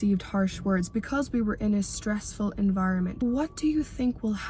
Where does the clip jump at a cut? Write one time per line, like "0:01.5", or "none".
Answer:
0:03.2